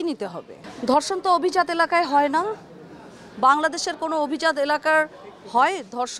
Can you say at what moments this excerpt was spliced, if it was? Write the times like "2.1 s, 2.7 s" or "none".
none